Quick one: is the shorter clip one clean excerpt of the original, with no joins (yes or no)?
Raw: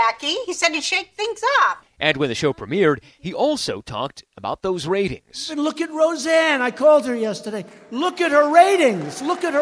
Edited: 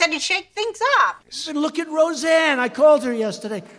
no